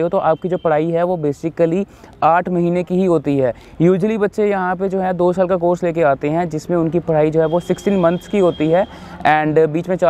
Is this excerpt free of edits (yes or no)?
yes